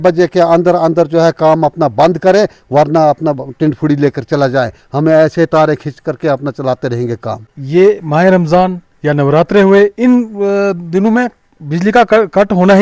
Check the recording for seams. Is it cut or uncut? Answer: cut